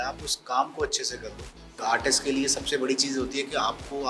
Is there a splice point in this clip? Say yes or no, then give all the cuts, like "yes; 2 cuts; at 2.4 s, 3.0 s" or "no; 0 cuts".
yes; 1 cut; at 1.7 s